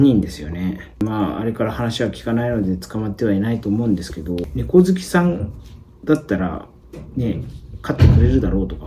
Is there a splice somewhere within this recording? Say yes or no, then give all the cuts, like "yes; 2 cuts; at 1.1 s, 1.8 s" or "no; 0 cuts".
yes; 2 cuts; at 1.0 s, 4.5 s